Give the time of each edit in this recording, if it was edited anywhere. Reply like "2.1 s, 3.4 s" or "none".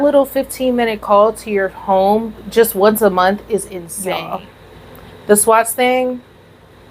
3.9 s